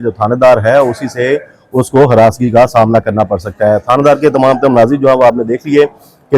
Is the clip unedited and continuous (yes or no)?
yes